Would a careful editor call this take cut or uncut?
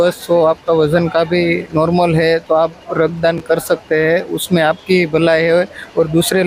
uncut